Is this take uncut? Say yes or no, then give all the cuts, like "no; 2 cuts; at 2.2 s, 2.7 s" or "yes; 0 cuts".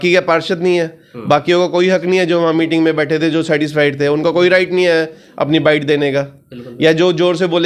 yes; 0 cuts